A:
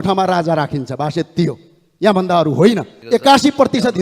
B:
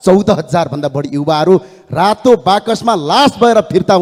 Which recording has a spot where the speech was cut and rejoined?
A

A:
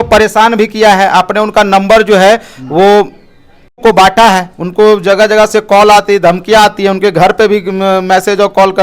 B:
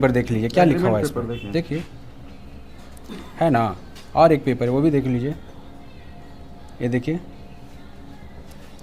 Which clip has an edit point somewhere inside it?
A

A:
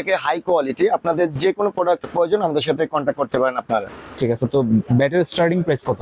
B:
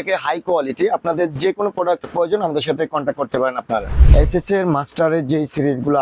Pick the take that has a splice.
B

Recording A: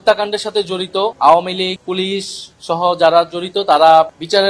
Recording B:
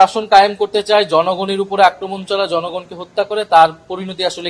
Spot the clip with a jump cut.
A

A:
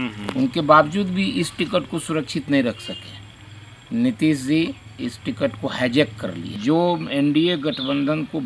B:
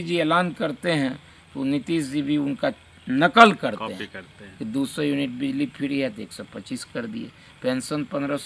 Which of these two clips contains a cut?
A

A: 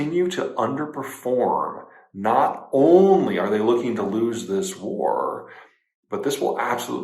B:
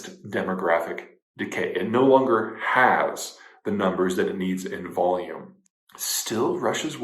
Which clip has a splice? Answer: B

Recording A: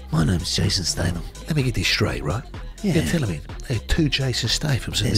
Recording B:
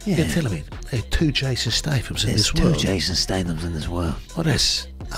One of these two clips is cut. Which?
A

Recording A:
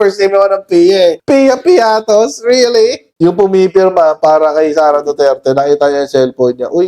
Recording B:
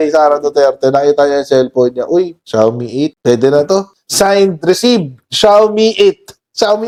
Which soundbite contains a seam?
A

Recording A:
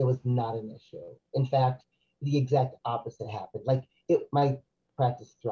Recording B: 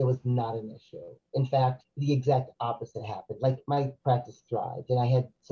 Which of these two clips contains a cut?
B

